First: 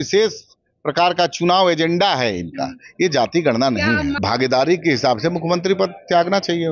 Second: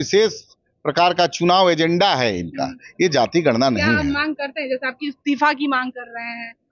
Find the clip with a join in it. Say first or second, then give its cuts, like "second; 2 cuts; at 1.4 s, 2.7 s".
first; 1 cut; at 4.2 s